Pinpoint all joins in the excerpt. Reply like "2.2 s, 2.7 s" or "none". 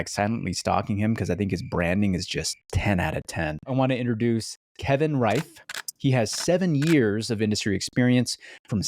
2.6 s, 3.7 s

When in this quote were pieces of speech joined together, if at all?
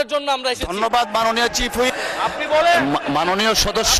1.9 s

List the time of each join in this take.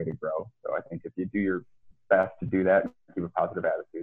none

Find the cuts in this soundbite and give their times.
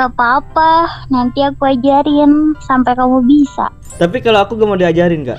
3.8 s

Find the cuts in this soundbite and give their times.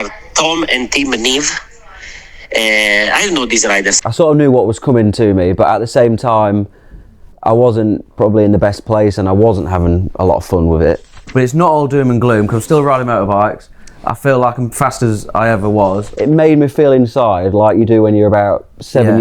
3.9 s, 11.1 s, 16.1 s

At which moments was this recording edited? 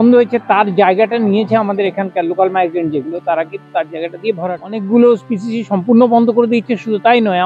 4.4 s

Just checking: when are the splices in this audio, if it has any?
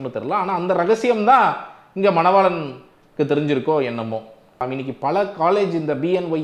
4.6 s

